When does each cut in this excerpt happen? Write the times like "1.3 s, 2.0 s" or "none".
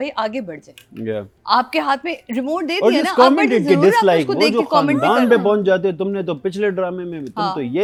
none